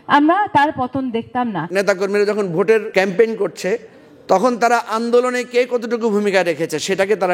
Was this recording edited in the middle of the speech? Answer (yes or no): yes